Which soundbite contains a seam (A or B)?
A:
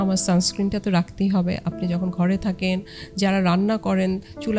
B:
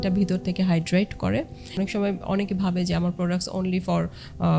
B